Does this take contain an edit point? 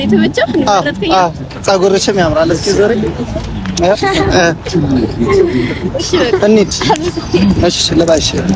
no; 0 cuts

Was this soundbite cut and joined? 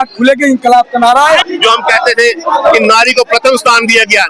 yes; 1 cut; at 1.5 s

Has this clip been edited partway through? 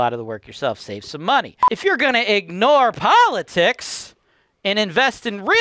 yes; 1 cut; at 1.6 s

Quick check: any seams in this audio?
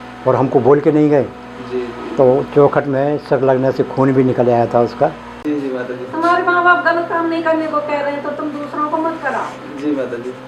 yes; 1 cut; at 5.4 s

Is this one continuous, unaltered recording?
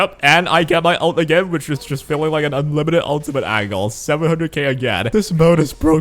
no; 1 cut; at 5.1 s

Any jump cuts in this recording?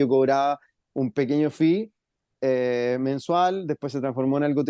no; 0 cuts

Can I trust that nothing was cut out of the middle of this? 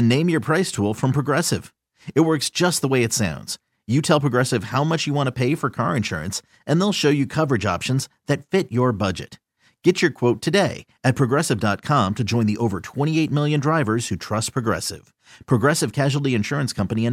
yes; 0 cuts

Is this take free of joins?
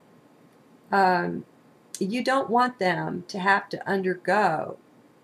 yes; 0 cuts

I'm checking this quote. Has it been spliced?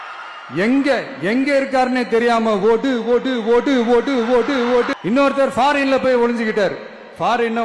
yes; 1 cut; at 4.9 s

